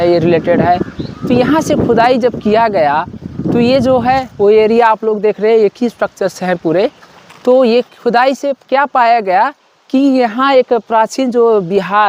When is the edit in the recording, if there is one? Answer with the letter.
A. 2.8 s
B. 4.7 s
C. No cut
C